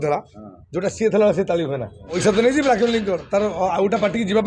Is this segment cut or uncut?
cut